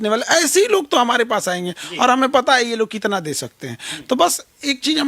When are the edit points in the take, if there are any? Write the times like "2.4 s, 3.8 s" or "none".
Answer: none